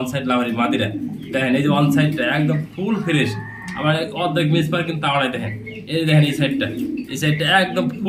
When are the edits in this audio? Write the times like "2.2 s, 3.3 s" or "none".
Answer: none